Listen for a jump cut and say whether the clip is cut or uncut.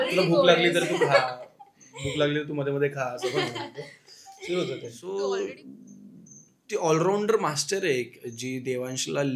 cut